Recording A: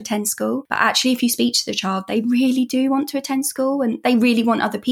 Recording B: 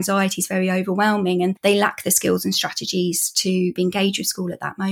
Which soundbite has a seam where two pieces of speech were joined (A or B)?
B